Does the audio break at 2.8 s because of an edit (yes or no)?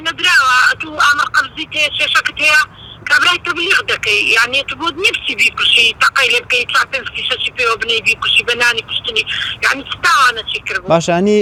no